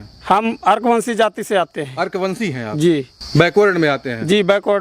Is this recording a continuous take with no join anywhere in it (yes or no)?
yes